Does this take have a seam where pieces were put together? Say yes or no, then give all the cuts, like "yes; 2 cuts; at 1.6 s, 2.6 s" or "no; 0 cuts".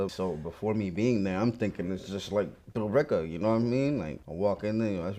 yes; 1 cut; at 4.2 s